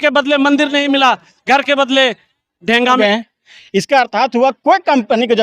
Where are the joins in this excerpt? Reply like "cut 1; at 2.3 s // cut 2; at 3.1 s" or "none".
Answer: cut 1; at 3.0 s